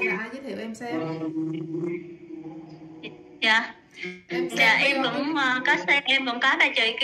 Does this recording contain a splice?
no; 0 cuts

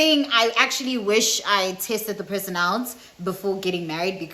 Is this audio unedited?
yes; 0 cuts

